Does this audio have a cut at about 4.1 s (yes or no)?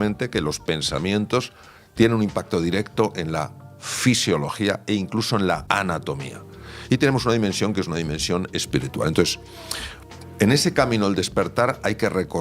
no